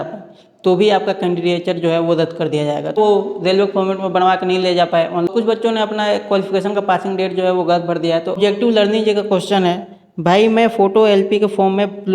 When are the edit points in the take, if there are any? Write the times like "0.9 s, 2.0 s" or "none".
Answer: 2.9 s, 5.3 s, 8.4 s